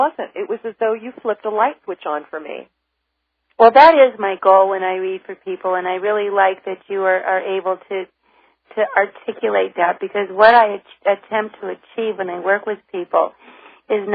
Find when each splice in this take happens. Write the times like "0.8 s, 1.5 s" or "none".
6.2 s